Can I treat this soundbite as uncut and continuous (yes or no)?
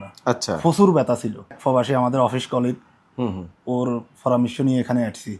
no